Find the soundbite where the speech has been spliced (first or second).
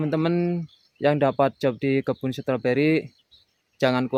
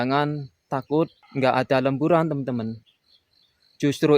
second